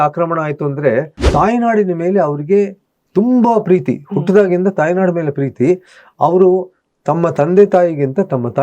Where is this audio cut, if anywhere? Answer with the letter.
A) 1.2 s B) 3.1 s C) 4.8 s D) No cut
A